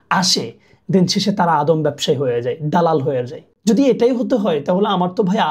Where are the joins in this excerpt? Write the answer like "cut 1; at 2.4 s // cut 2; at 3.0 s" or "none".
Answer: none